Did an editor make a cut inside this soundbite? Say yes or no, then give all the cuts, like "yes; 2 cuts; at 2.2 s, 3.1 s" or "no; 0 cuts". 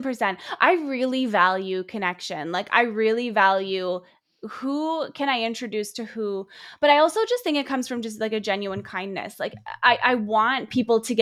no; 0 cuts